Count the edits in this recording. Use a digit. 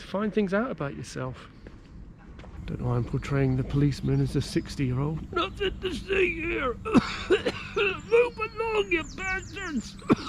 1